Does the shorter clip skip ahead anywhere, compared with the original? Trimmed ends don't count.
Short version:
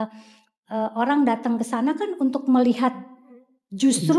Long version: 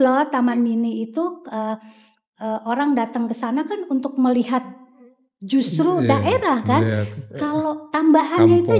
no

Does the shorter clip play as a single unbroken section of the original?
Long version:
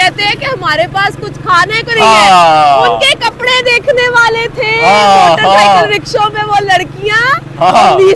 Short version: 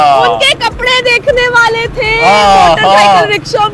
yes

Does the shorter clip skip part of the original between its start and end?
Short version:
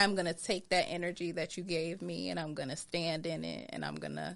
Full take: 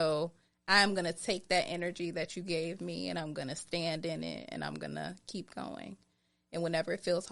no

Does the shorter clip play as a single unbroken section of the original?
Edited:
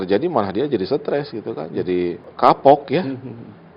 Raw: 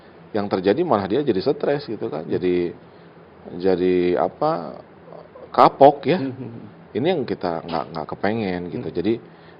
no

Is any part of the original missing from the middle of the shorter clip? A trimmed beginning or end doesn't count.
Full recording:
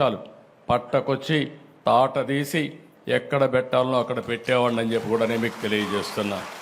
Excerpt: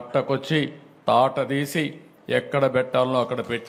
no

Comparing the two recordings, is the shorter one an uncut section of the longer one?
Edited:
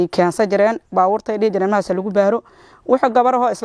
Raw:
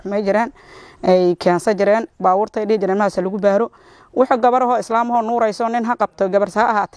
yes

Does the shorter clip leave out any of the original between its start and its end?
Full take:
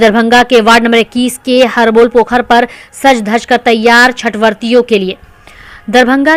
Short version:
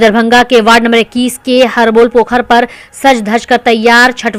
no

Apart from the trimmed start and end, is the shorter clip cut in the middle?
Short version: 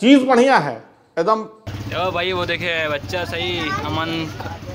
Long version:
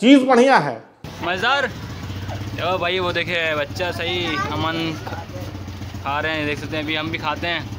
yes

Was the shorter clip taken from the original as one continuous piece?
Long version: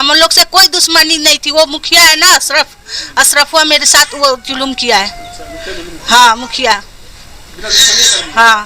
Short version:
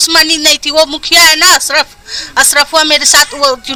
yes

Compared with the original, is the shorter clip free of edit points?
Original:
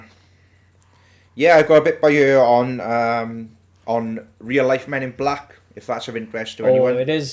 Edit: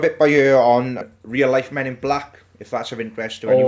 no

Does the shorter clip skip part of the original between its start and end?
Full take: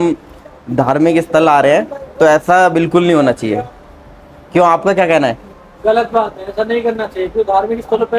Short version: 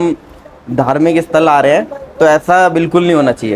no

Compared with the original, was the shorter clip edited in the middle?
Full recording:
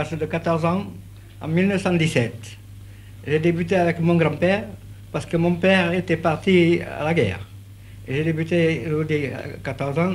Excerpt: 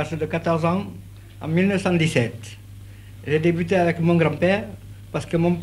no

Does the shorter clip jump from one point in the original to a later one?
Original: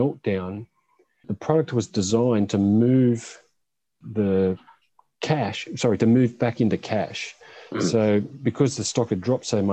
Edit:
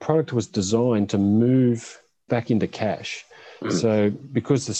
yes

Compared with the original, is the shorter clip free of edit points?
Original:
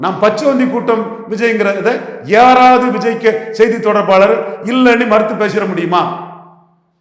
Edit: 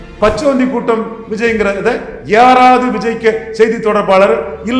yes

